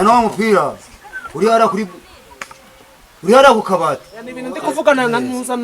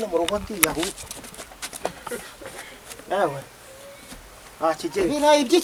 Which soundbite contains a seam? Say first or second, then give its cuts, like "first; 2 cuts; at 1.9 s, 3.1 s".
first; 1 cut; at 4.7 s